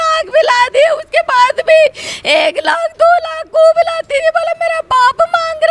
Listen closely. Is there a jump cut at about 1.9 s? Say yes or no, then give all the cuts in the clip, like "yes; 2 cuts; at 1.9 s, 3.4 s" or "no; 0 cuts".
no; 0 cuts